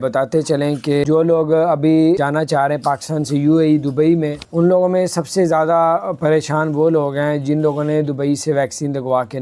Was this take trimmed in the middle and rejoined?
yes; 3 cuts; at 1.0 s, 2.2 s, 4.4 s

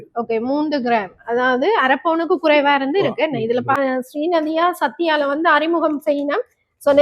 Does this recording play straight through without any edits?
no; 1 cut; at 3.8 s

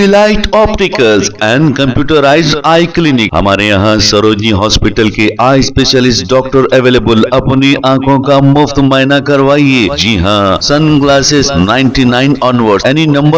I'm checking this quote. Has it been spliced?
no; 0 cuts

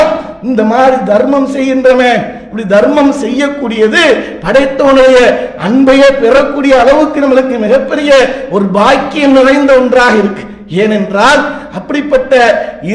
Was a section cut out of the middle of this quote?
no; 0 cuts

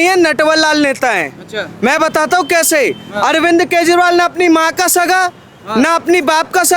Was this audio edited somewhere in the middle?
no; 0 cuts

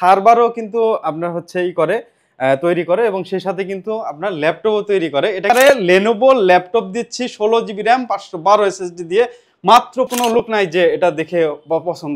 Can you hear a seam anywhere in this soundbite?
yes; 2 cuts; at 5.5 s, 10.1 s

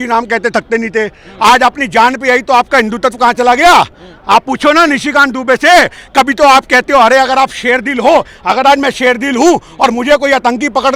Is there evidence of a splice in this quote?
no; 0 cuts

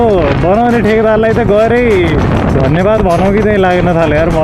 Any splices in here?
no; 0 cuts

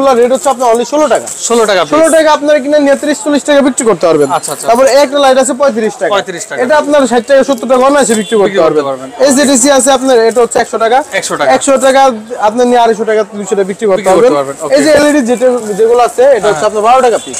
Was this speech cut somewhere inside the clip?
no; 0 cuts

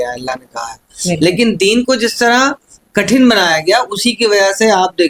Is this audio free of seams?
yes; 0 cuts

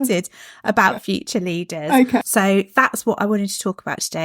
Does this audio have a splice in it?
yes; 1 cut; at 2.3 s

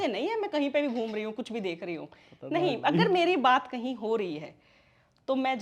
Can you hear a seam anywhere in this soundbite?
no; 0 cuts

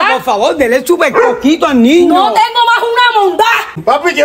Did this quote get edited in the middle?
no; 0 cuts

